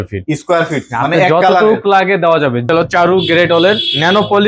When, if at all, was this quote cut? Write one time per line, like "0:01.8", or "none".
0:02.7